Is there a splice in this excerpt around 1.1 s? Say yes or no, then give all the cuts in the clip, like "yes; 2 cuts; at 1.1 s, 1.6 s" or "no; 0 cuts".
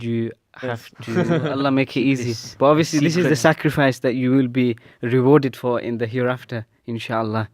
yes; 1 cut; at 1.1 s